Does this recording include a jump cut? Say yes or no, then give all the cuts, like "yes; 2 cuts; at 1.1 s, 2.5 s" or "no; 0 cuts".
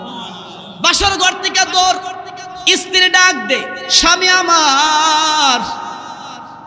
no; 0 cuts